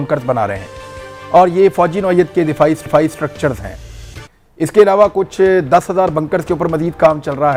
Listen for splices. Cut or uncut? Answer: uncut